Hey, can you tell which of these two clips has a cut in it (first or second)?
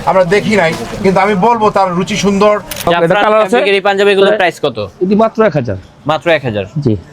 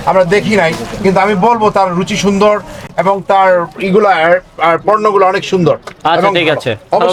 first